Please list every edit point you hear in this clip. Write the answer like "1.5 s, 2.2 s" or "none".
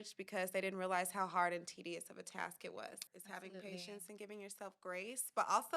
3.1 s